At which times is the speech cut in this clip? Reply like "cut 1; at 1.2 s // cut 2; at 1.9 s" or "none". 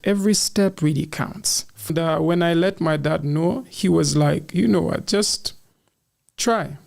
cut 1; at 1.9 s